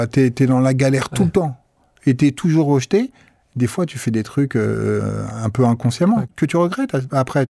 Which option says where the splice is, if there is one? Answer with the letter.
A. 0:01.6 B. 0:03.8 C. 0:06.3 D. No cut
C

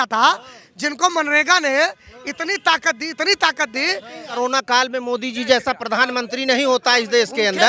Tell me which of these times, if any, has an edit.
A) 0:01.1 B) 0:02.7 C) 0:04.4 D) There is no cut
C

